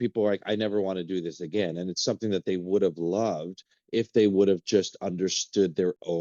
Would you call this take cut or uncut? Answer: uncut